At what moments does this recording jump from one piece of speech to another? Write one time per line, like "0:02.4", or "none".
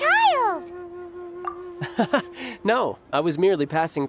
none